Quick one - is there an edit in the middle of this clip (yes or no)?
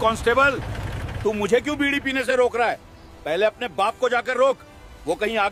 no